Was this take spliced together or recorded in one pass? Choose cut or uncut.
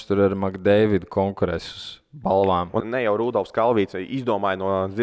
cut